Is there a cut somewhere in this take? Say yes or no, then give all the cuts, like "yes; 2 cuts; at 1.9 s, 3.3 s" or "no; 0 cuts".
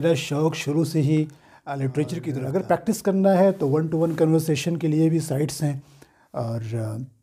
yes; 1 cut; at 2.3 s